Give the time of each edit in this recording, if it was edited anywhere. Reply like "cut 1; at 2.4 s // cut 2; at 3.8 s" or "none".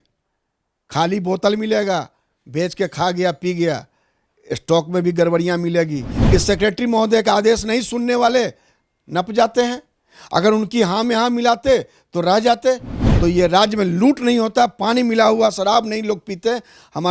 cut 1; at 6.1 s // cut 2; at 13.0 s